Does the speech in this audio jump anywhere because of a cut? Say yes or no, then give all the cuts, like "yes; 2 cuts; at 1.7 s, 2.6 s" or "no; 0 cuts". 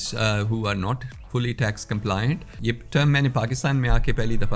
yes; 1 cut; at 2.5 s